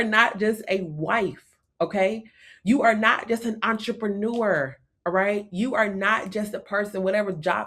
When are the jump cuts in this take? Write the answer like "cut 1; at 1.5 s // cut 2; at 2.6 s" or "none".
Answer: none